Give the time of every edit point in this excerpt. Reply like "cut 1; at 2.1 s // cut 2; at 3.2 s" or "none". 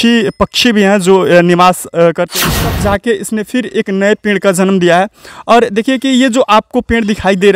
cut 1; at 2.7 s